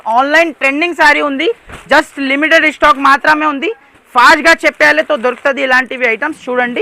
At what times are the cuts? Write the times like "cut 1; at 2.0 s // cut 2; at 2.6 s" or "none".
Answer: none